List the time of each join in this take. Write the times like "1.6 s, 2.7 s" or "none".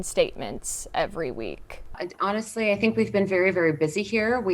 2.1 s